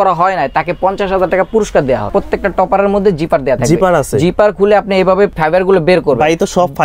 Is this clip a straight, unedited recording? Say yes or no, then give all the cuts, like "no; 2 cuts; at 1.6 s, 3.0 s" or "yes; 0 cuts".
no; 2 cuts; at 2.1 s, 5.4 s